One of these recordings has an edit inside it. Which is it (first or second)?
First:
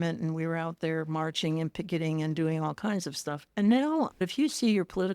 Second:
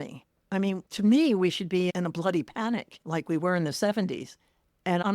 first